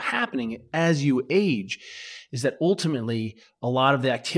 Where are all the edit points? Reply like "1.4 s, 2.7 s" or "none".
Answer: none